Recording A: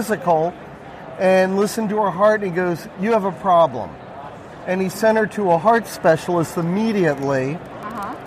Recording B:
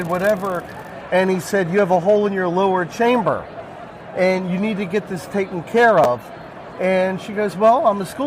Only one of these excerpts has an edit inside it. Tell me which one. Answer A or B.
B